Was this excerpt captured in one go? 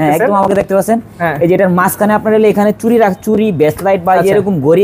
yes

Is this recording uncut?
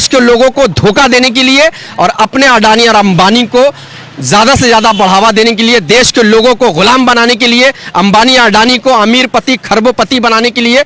yes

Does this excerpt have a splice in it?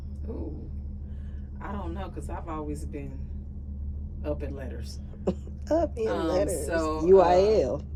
no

